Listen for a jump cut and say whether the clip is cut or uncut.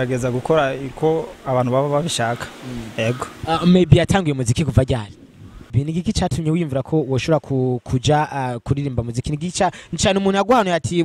cut